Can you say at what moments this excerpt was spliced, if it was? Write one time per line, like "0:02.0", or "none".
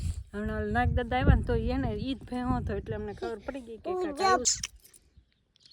0:04.4